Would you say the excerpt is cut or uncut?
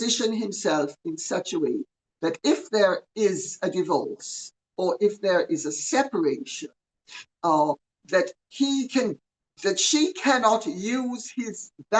uncut